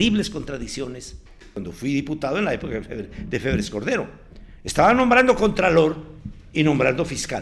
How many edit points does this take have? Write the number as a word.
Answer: one